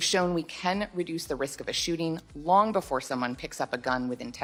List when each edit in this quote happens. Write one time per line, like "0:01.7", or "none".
none